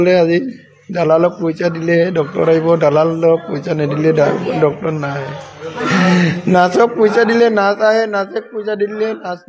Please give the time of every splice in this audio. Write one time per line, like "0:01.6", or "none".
none